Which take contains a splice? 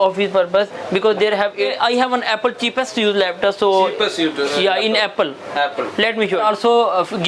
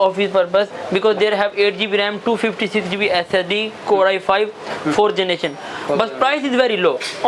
first; 2 cuts; at 1.5 s, 6.4 s

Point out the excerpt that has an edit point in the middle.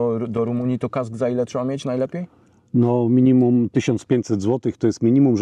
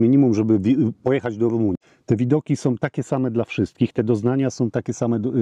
second; 1 cut; at 1.8 s

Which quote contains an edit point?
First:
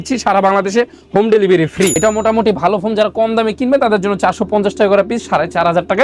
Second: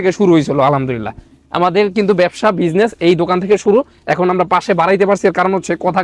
first; 1 cut; at 1.9 s

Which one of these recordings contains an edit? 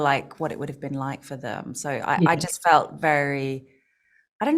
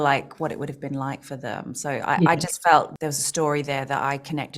second; 1 cut; at 2.9 s

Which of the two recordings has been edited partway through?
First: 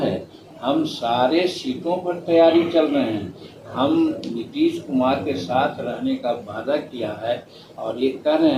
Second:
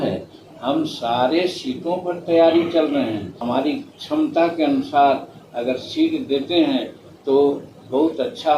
second; 1 cut; at 3.3 s

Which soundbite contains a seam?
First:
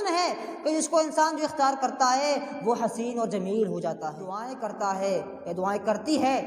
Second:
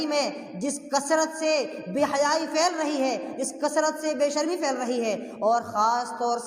first; 1 cut; at 4.5 s

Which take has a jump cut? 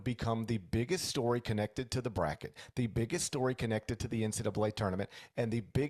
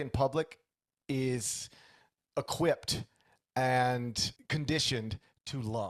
second; 1 cut; at 4.3 s

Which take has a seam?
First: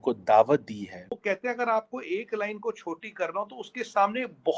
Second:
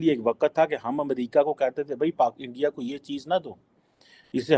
first; 1 cut; at 1.2 s

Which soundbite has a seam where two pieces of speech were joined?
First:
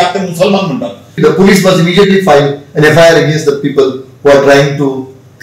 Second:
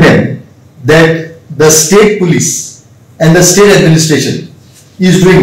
first; 1 cut; at 1.1 s

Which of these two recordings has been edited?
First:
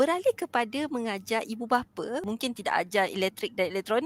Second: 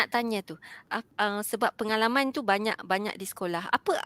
second; 1 cut; at 0.9 s

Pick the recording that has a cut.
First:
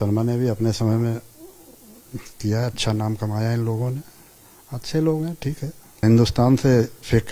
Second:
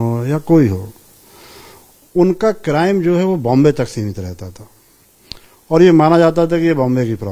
first; 1 cut; at 6.0 s

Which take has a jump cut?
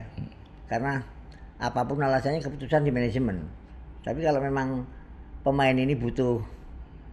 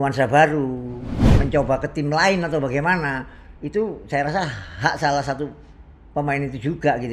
second; 1 cut; at 1.3 s

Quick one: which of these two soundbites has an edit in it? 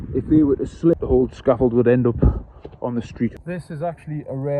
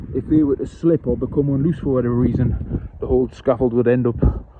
first; 2 cuts; at 0.9 s, 3.3 s

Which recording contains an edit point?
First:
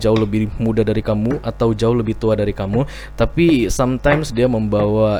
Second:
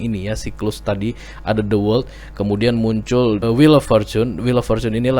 second; 1 cut; at 3.4 s

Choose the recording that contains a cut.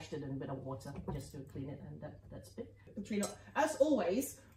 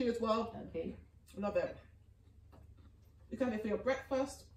first; 1 cut; at 2.9 s

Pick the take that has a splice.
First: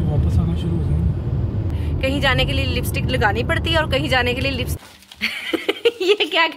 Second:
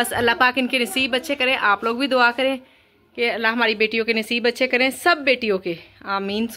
first; 2 cuts; at 1.7 s, 4.8 s

